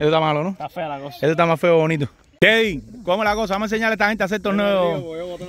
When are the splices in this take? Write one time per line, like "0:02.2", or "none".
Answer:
0:02.2

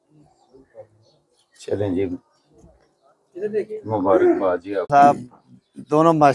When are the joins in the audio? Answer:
0:04.9

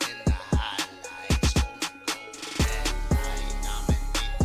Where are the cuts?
0:03.4

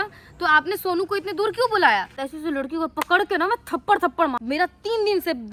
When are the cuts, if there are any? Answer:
0:02.2
0:04.4

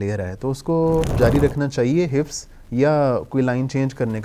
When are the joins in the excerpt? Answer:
0:01.1

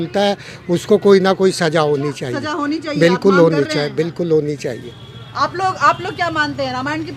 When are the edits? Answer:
none

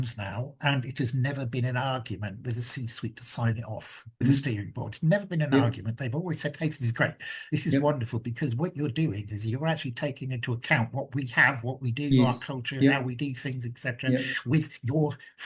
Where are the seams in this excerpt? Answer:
0:04.2

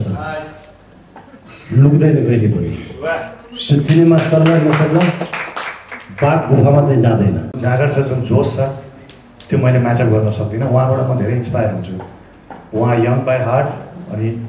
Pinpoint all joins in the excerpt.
0:07.6

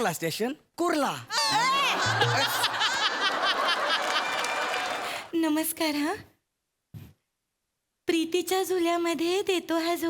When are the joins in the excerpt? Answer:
0:05.1

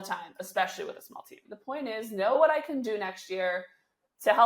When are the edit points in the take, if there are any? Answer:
0:01.5

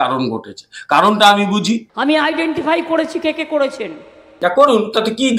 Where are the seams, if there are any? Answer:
0:01.9

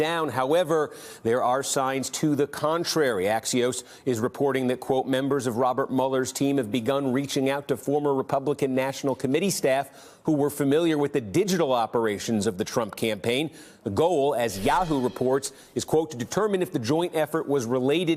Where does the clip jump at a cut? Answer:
none

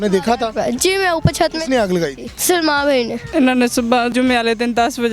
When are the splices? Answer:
0:02.3
0:03.2
0:04.1

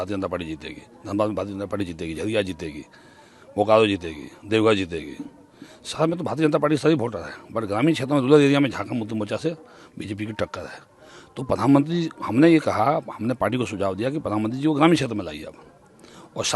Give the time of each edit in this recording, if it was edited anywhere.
none

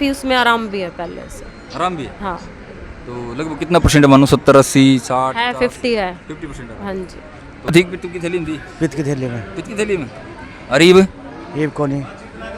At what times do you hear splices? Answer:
0:07.7

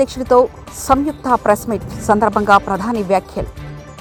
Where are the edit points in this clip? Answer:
none

